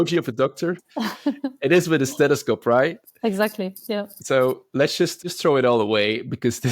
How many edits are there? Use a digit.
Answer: 1